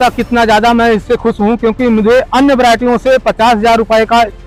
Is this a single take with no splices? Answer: yes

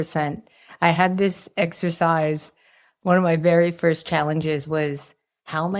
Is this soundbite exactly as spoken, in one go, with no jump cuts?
yes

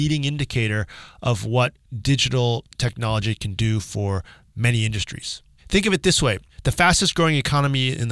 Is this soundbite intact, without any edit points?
no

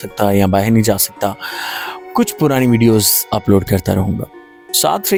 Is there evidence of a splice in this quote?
no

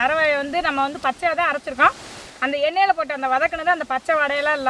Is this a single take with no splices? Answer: yes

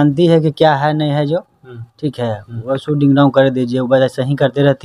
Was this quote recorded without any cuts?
yes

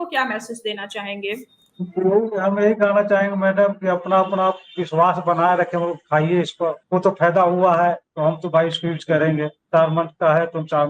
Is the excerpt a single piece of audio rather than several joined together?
no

